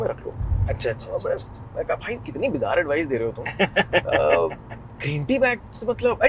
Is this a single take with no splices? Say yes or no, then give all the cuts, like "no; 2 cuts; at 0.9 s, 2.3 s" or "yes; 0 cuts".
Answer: yes; 0 cuts